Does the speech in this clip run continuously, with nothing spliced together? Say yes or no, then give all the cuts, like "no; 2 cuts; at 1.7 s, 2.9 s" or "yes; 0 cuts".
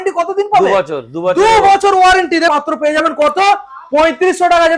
no; 1 cut; at 2.5 s